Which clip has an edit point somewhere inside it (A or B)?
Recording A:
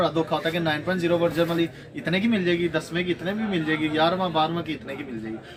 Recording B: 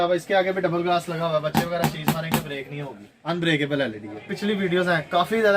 B